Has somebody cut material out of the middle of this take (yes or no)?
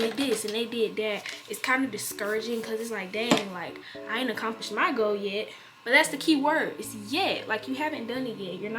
no